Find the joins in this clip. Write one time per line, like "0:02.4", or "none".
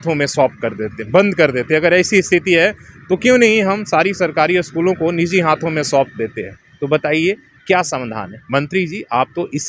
none